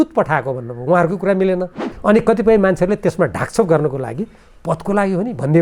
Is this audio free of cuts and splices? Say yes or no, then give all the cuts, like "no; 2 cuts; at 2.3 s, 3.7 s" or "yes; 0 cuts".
no; 1 cut; at 1.8 s